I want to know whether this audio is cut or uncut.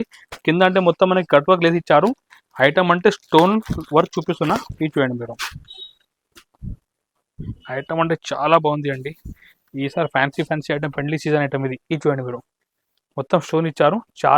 uncut